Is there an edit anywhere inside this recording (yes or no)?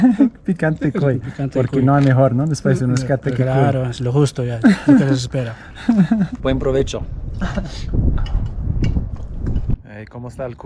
no